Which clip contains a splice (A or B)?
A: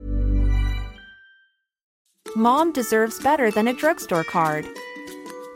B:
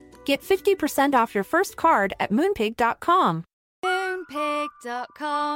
A